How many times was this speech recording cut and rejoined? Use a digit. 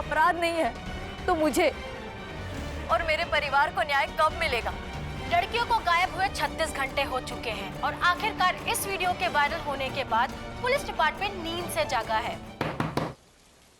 1